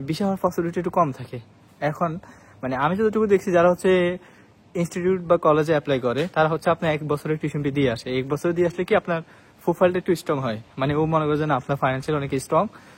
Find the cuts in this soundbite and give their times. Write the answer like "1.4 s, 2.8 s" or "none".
none